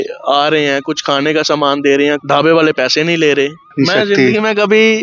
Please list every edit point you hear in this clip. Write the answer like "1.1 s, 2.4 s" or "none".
2.2 s, 3.6 s